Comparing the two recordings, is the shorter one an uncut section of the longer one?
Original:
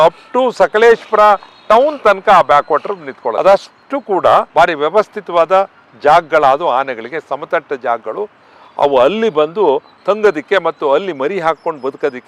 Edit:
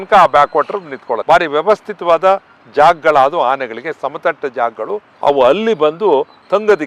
no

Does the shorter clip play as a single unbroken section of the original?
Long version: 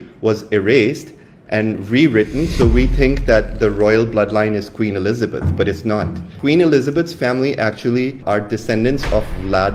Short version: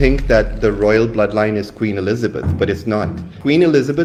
yes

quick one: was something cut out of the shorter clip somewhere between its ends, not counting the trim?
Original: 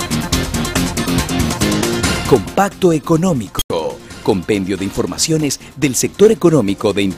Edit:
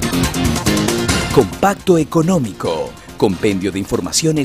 yes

